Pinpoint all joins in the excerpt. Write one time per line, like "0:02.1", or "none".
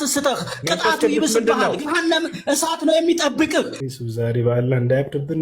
0:03.8